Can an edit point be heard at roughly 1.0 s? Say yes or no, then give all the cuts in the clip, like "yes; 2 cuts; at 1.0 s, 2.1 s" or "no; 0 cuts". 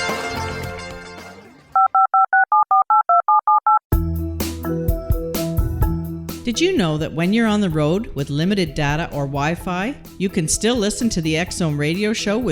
yes; 1 cut; at 1.0 s